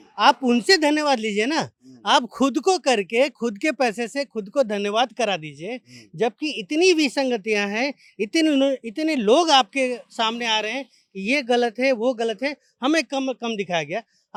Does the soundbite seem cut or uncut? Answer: uncut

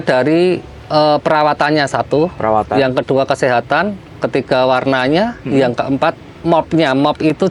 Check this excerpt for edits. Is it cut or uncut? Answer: uncut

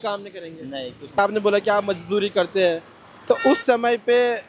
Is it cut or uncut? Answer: cut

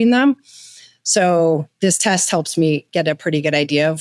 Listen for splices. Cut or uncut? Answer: uncut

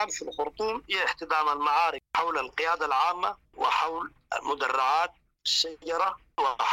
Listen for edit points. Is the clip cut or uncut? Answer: uncut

